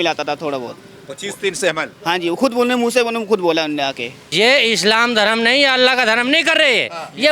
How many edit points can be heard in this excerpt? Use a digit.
1